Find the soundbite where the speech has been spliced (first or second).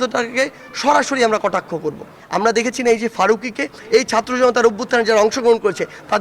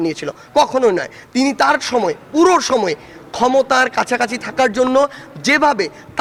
first